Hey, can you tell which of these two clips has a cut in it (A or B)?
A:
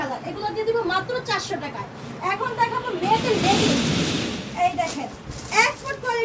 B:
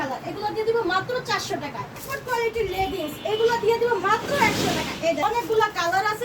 B